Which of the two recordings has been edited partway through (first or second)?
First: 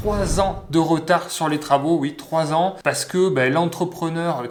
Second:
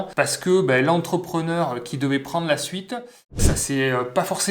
second